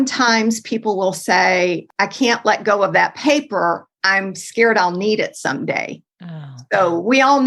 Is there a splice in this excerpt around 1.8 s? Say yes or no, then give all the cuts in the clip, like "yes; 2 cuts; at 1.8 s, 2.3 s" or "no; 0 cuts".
yes; 1 cut; at 1.8 s